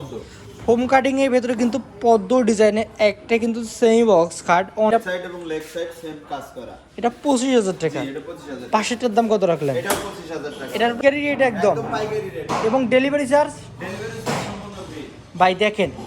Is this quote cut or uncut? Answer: cut